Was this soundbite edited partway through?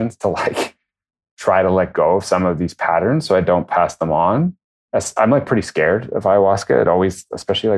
no; 0 cuts

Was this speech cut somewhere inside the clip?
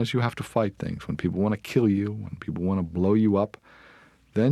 no; 0 cuts

